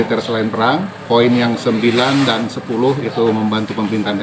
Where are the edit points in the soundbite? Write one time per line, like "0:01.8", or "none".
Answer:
0:01.0